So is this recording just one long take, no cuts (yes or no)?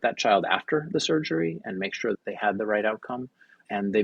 no